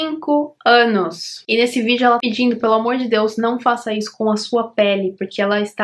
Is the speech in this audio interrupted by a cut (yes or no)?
no